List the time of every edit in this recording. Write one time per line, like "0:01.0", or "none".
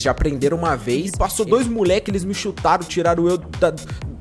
0:01.1